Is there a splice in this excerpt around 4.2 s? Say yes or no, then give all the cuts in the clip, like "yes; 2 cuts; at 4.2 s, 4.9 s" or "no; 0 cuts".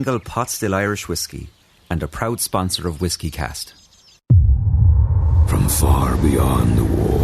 yes; 1 cut; at 4.2 s